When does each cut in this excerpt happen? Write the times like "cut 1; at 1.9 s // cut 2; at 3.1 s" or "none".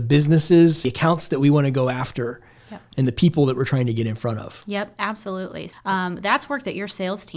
cut 1; at 0.9 s // cut 2; at 5.7 s